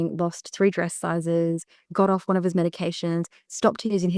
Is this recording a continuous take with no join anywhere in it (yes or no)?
yes